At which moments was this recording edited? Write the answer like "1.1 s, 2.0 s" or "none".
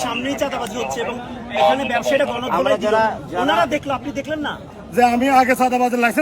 4.8 s

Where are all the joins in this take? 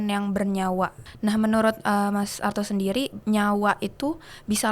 1.0 s, 3.1 s

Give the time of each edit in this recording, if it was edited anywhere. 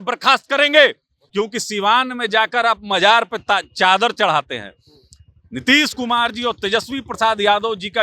1.2 s

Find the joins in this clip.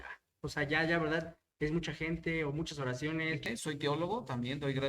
3.4 s

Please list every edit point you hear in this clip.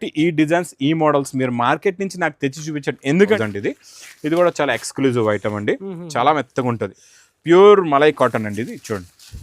3.4 s

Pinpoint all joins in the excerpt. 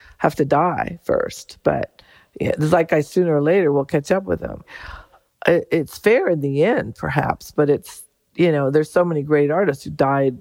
none

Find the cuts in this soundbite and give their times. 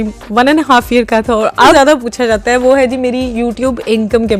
1.7 s

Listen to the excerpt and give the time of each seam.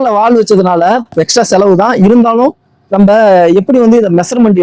1.1 s

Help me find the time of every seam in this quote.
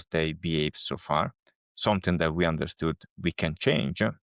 none

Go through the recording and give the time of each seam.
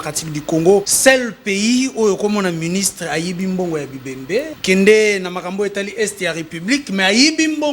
0.9 s, 4.5 s

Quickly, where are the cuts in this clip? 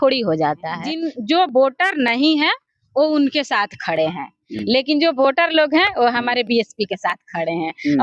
1.0 s

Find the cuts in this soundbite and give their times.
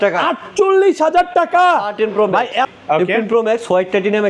2.7 s

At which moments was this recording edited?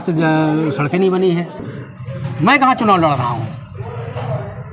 1.6 s

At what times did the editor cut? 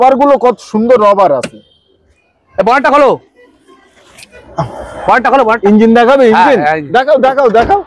none

